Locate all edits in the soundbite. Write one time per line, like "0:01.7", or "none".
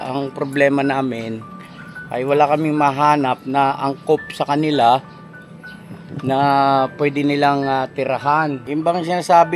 0:08.6